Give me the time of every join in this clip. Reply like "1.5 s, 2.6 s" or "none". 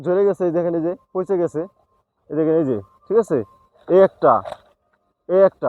none